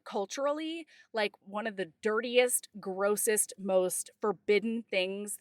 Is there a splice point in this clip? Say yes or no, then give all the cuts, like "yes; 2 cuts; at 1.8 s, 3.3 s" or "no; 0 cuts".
yes; 1 cut; at 1.4 s